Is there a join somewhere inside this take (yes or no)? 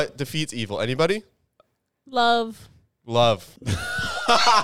yes